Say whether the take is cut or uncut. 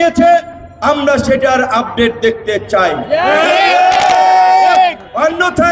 uncut